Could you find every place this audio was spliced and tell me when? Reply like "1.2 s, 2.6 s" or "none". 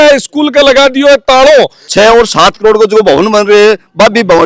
1.8 s